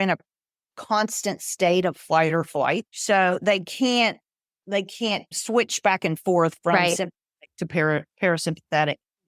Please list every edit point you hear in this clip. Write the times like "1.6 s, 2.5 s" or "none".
2.9 s, 5.3 s

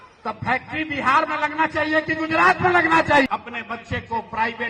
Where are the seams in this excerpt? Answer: 3.3 s

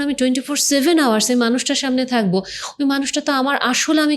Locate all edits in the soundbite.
none

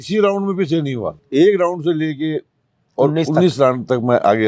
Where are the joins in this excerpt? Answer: 1.2 s

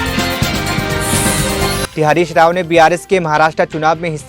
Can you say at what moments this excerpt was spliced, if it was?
1.9 s

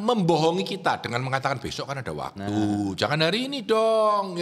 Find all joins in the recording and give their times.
none

